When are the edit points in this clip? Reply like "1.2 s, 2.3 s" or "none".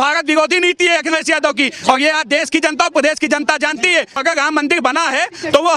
4.2 s

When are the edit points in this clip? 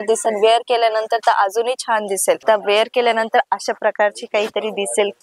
2.4 s

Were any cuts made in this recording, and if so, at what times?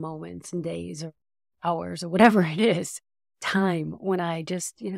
none

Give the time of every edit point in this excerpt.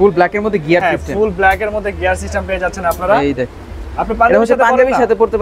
3.5 s

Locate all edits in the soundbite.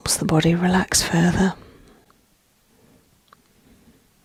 none

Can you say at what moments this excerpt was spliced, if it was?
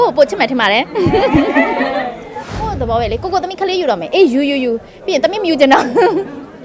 2.6 s

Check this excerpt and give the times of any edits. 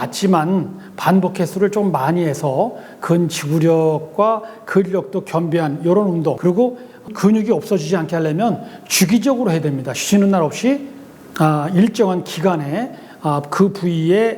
6.4 s

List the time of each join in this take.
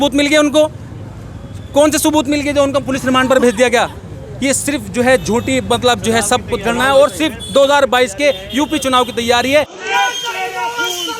9.7 s

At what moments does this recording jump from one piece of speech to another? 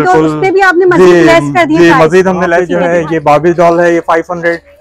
2.7 s

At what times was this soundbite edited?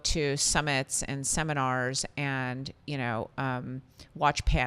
none

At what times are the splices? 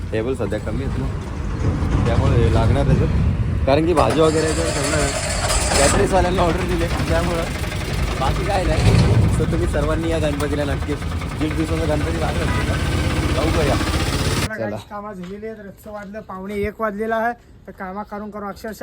14.5 s

